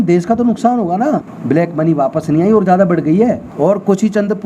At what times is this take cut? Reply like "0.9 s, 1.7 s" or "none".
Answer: 1.3 s, 3.5 s